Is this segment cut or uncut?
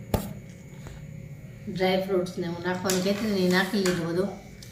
uncut